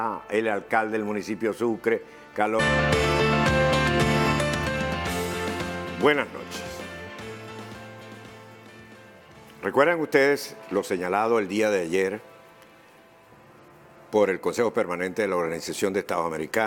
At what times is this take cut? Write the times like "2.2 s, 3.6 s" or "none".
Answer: none